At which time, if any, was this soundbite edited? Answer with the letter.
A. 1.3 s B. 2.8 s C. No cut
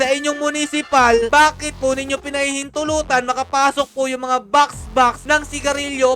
A